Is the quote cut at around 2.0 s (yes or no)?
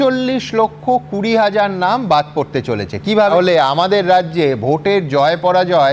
no